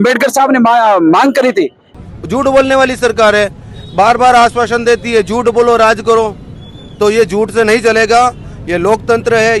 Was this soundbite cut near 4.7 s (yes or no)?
no